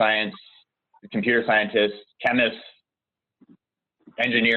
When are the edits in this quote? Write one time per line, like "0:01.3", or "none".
0:02.1